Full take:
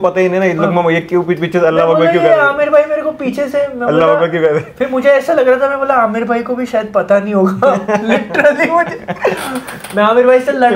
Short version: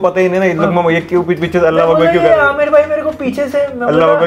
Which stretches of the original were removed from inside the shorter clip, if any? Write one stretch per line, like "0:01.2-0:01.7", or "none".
none